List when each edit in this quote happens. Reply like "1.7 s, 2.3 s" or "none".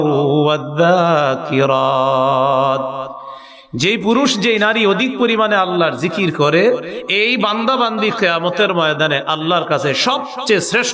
none

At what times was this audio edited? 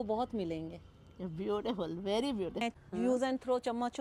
2.6 s

